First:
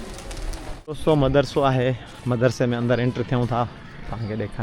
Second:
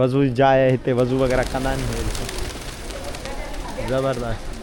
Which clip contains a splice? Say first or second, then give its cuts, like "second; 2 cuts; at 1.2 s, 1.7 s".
first; 1 cut; at 1.0 s